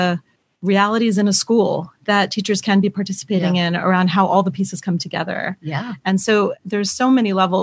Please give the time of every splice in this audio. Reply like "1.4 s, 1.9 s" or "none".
6.6 s